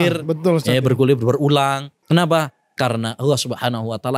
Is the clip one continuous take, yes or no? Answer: no